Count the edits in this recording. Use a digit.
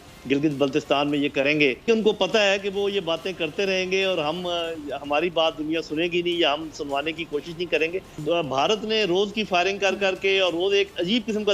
2